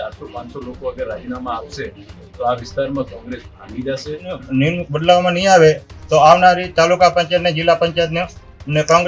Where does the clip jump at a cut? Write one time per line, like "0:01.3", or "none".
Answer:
0:04.4

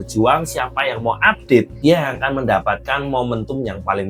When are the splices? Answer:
none

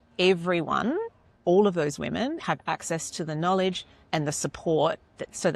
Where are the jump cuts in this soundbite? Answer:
none

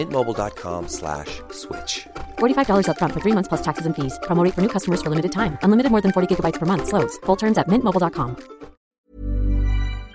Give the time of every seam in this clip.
0:08.8

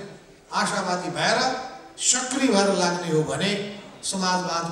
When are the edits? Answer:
none

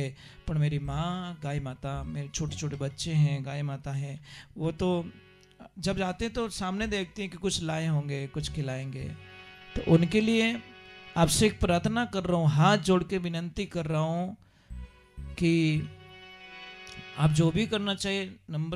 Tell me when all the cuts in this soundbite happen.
none

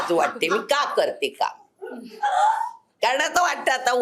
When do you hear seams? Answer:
none

